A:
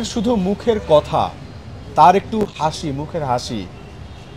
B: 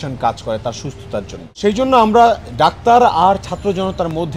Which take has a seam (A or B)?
B